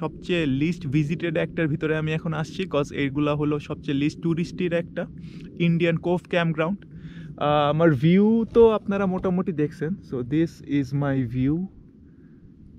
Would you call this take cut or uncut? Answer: uncut